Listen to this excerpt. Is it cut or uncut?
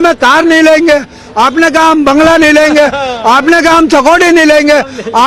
uncut